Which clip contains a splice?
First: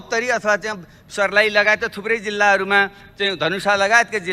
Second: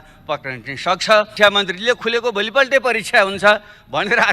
second; 1 cut; at 1.3 s

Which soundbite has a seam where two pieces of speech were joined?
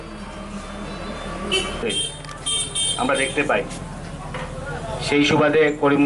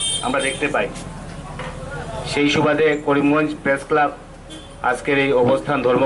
first; 1 cut; at 1.8 s

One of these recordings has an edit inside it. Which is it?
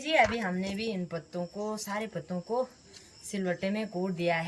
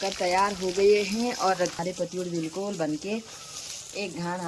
second; 1 cut; at 1.7 s

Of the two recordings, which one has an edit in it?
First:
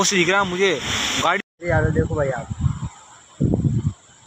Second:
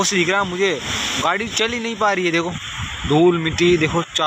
first; 1 cut; at 1.5 s

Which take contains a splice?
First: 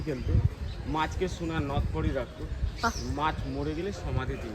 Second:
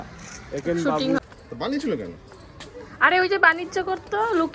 second; 1 cut; at 1.2 s

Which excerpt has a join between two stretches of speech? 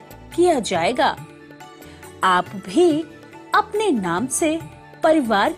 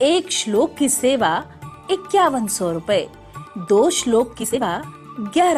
second; 1 cut; at 4.6 s

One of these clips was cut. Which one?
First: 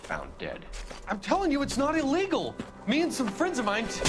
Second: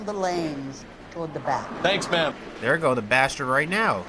second; 1 cut; at 2.5 s

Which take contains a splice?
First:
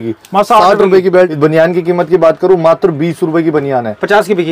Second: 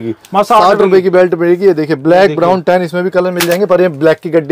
first; 1 cut; at 1.3 s

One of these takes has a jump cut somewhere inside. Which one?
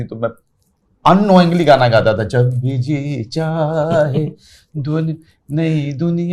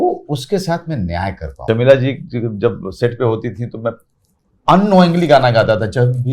second; 1 cut; at 1.6 s

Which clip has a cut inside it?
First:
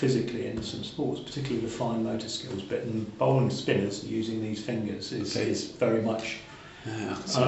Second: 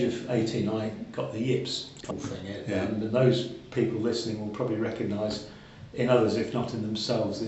second; 1 cut; at 2.0 s

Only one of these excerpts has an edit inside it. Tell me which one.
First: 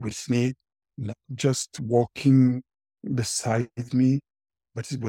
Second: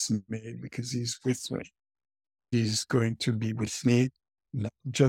second; 1 cut; at 2.5 s

